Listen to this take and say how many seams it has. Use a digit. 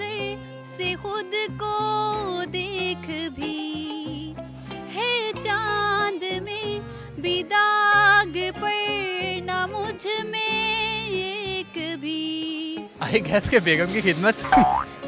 1